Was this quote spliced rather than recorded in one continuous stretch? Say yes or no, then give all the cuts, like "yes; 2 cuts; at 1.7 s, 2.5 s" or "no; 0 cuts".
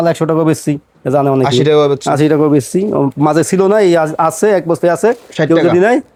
no; 0 cuts